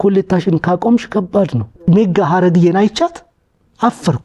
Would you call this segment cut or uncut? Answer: cut